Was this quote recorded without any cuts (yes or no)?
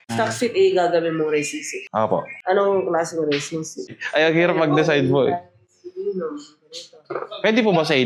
yes